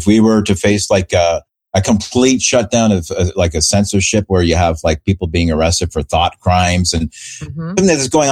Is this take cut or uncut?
uncut